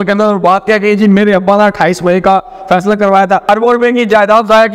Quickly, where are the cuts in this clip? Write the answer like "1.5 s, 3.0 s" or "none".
3.5 s